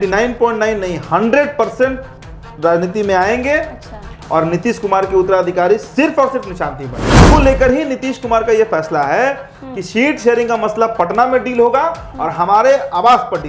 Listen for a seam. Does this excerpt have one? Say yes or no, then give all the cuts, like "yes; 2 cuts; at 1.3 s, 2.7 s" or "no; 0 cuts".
yes; 1 cut; at 7.2 s